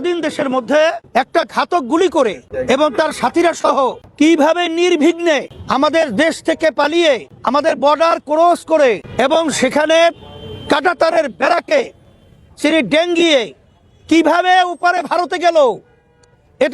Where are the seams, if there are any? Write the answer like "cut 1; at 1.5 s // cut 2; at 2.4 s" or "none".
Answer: cut 1; at 1.0 s // cut 2; at 2.5 s // cut 3; at 4.0 s // cut 4; at 5.6 s // cut 5; at 7.3 s // cut 6; at 9.1 s